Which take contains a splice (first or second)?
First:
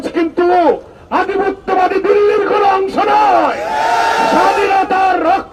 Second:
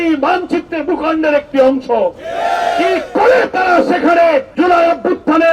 second